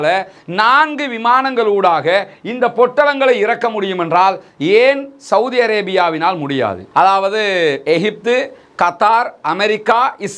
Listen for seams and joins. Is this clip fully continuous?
no; 1 cut; at 6.8 s

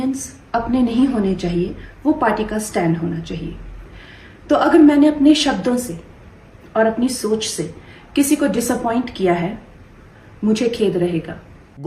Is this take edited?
no; 0 cuts

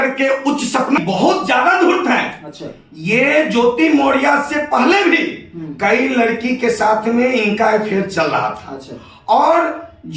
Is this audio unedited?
no; 1 cut; at 1.0 s

